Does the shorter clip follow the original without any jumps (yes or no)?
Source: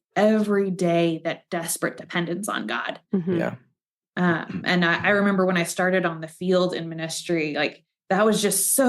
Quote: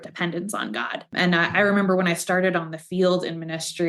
no